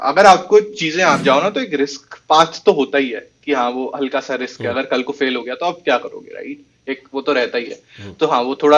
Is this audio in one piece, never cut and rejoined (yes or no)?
no